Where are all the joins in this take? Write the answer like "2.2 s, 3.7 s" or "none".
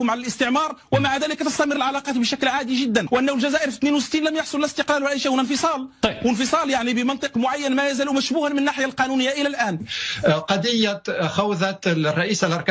3.1 s, 9.8 s